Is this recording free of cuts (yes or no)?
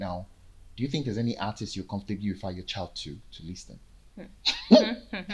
yes